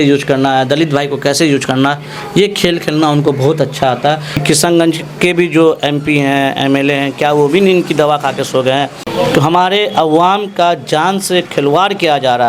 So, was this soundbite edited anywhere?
yes; 2 cuts; at 4.4 s, 9.0 s

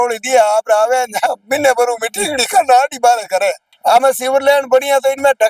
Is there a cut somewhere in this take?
yes; 1 cut; at 3.7 s

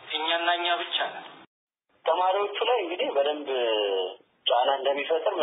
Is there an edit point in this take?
yes; 1 cut; at 1.7 s

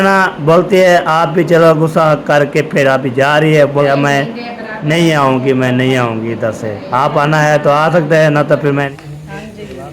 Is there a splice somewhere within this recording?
yes; 2 cuts; at 3.9 s, 8.9 s

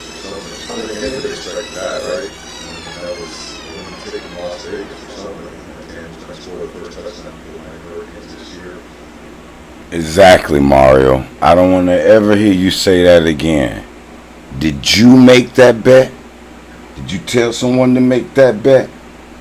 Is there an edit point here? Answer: yes; 2 cuts; at 0.7 s, 9.5 s

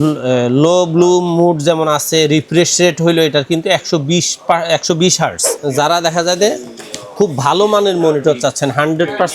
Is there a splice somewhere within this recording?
yes; 1 cut; at 5.5 s

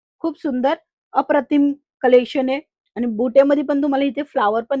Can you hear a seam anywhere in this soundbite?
no; 0 cuts

